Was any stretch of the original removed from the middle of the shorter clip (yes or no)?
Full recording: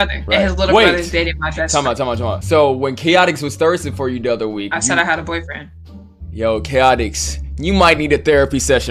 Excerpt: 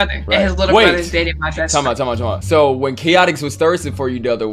no